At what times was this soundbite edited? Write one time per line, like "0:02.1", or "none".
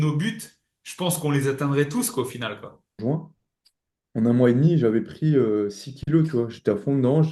0:03.0